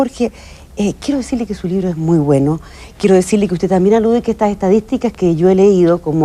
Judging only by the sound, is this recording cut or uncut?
uncut